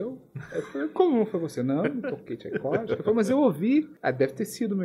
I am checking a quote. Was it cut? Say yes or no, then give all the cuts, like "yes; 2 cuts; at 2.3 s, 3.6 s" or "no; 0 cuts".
yes; 1 cut; at 3.9 s